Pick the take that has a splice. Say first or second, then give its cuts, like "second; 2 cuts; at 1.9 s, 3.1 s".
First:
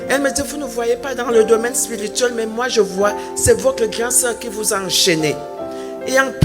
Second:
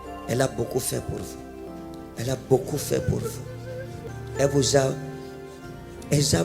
second; 2 cuts; at 1.7 s, 4.0 s